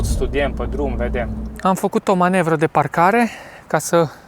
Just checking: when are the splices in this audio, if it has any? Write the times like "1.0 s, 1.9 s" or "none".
1.4 s